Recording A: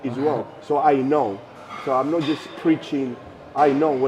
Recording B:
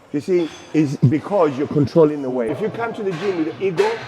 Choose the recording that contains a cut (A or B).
B